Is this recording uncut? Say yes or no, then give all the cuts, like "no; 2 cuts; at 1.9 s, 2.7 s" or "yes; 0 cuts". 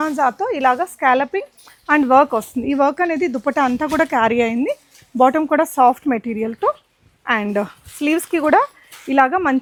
yes; 0 cuts